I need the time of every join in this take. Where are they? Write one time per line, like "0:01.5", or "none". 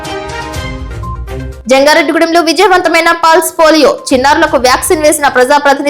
0:01.2